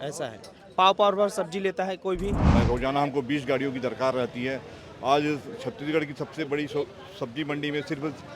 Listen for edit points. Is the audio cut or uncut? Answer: cut